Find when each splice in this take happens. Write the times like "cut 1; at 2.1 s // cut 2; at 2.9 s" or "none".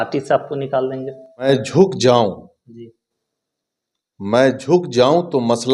cut 1; at 1.5 s

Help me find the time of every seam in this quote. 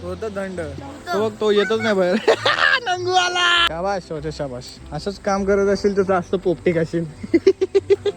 cut 1; at 3.7 s

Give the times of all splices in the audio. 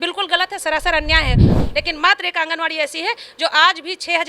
cut 1; at 1.5 s

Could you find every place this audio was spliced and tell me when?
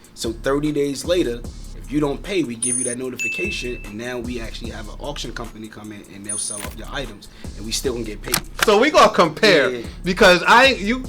cut 1; at 8.6 s

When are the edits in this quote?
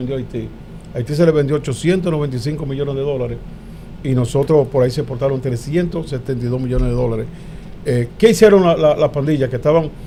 none

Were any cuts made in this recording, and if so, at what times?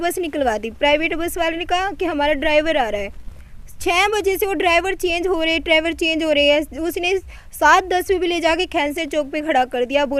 none

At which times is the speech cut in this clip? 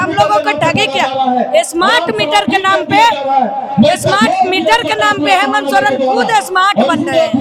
none

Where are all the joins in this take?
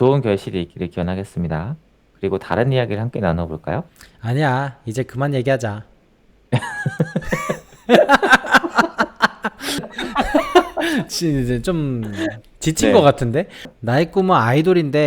cut 1; at 9.9 s // cut 2; at 13.6 s

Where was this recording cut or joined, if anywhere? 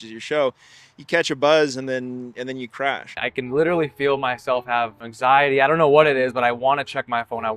cut 1; at 3.3 s // cut 2; at 5.0 s

